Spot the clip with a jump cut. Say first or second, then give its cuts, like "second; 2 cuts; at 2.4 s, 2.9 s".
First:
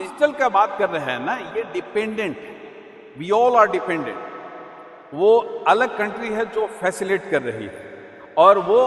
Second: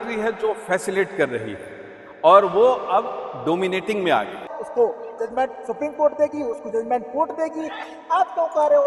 second; 1 cut; at 4.5 s